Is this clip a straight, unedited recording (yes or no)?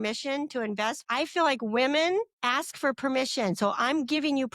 no